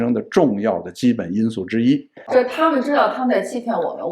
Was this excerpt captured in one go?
no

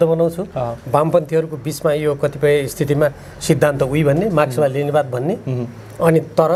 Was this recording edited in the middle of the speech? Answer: no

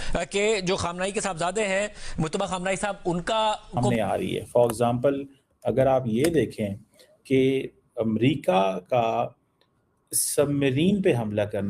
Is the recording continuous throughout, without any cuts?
no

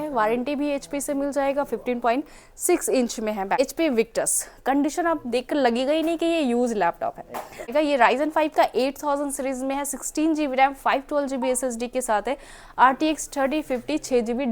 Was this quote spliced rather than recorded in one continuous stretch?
yes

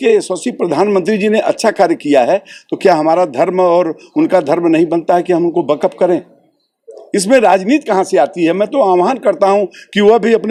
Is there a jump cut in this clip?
no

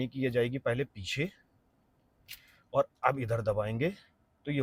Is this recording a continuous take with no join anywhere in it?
yes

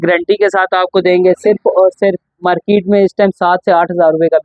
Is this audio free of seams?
yes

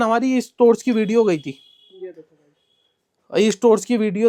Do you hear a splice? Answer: no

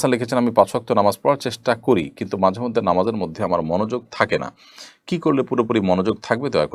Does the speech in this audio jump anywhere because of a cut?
no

